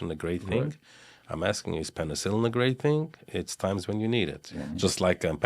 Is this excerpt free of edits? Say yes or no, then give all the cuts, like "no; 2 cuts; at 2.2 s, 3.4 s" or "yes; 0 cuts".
no; 1 cut; at 4.4 s